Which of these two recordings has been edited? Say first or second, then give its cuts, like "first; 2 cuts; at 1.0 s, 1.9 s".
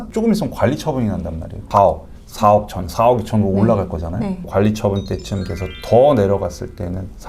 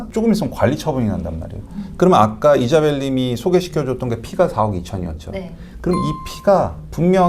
first; 2 cuts; at 1.6 s, 4.4 s